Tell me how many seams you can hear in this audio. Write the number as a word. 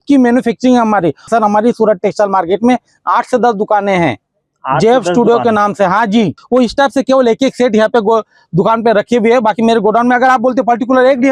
two